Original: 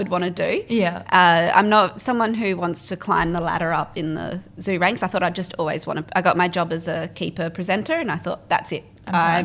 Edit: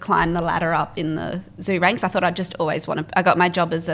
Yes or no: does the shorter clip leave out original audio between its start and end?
no